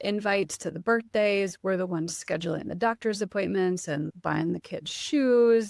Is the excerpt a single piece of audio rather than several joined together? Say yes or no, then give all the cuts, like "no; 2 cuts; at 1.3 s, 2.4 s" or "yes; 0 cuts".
yes; 0 cuts